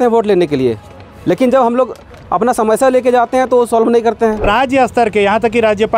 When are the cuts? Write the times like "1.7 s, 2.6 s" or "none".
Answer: 4.4 s